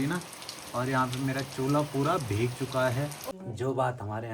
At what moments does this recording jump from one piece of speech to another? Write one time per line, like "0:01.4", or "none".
0:03.2